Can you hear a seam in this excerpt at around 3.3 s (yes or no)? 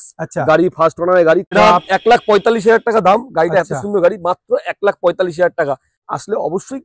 no